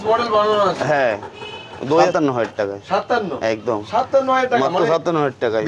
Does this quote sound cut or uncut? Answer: cut